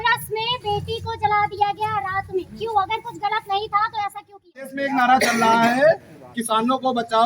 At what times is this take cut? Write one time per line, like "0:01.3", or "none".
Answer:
0:04.8